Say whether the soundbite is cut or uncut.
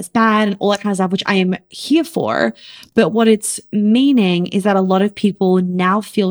uncut